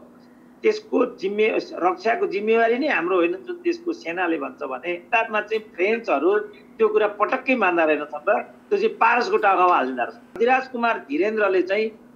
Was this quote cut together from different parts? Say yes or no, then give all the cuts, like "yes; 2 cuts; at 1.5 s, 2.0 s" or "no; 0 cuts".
yes; 2 cuts; at 5.0 s, 10.2 s